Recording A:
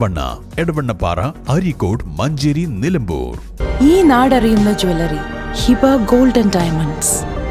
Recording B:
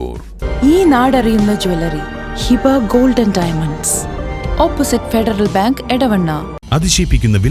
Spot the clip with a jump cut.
B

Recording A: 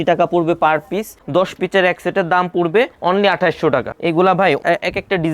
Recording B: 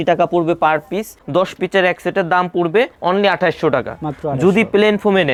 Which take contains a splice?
A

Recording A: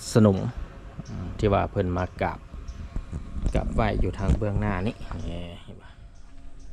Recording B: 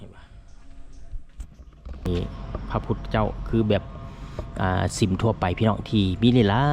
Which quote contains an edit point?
B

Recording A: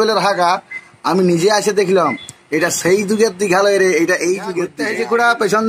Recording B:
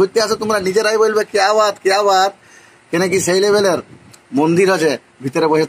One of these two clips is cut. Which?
A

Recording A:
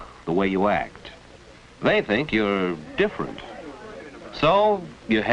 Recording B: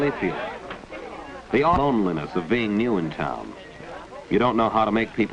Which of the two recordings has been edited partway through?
B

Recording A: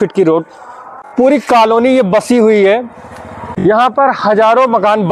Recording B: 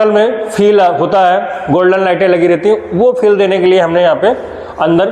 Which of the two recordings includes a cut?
A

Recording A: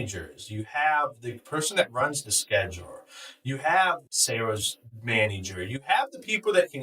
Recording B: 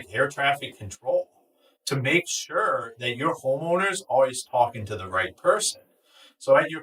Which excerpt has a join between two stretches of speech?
A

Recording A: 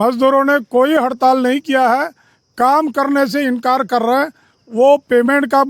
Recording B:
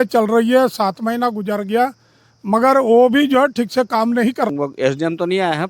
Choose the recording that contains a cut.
B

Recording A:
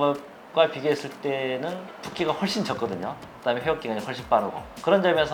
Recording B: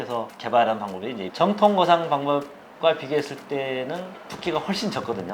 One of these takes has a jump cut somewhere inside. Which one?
B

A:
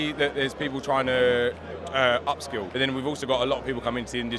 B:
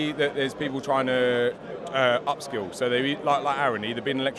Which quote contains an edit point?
A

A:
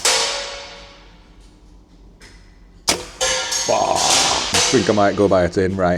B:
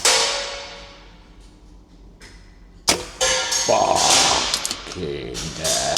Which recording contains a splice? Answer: A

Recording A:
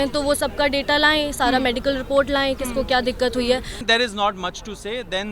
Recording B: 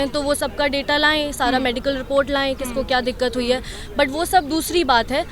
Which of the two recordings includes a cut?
A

